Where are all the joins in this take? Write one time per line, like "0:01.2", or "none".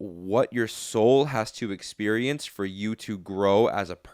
none

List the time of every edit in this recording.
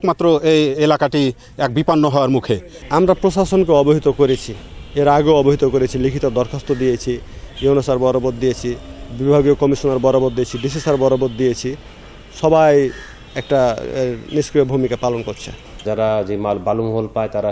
0:02.7
0:15.8

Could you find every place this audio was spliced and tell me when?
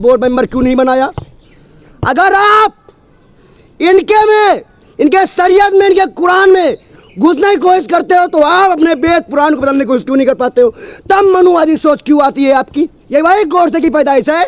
0:13.0

